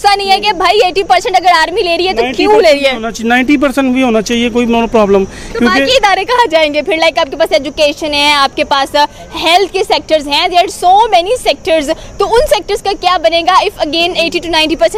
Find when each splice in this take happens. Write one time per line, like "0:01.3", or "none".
none